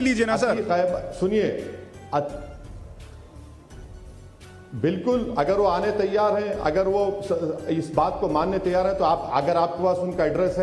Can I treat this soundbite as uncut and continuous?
yes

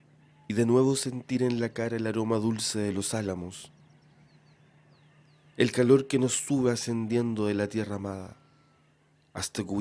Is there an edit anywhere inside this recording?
yes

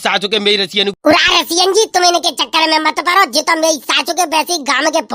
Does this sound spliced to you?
yes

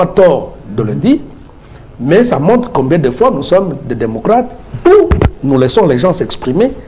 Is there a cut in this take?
no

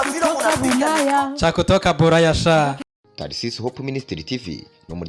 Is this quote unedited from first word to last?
no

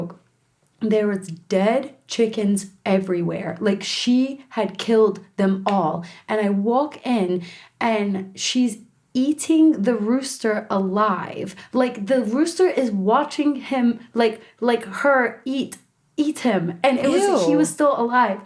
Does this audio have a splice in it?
no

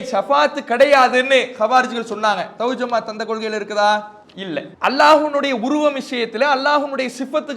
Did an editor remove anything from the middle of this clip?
yes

